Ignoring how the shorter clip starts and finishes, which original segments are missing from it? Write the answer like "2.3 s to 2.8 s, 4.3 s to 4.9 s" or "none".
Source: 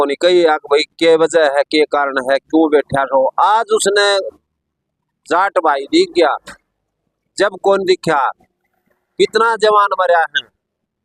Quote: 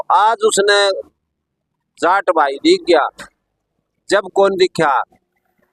none